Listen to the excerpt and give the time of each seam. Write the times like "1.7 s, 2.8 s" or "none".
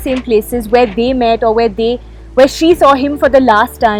none